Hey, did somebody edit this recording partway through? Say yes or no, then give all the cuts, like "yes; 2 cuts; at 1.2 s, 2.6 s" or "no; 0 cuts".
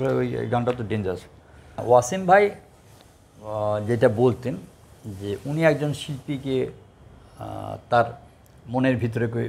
yes; 1 cut; at 1.8 s